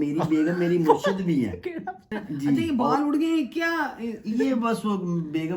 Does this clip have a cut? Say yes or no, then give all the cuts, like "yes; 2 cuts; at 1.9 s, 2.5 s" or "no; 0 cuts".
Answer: yes; 1 cut; at 2.2 s